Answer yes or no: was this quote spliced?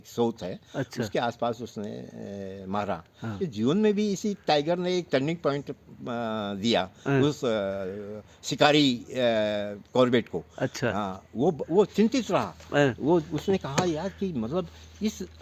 yes